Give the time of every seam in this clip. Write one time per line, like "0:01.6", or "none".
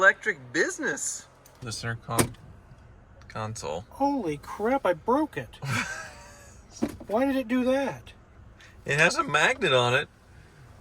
0:01.7